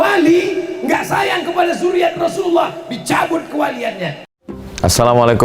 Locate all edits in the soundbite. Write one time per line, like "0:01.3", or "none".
0:04.3